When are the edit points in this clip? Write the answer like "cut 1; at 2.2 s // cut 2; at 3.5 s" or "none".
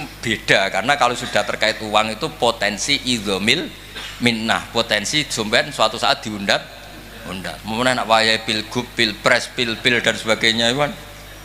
none